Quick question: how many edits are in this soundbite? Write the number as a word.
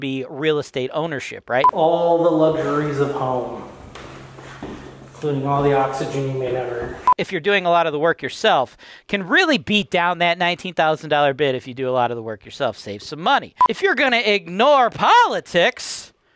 three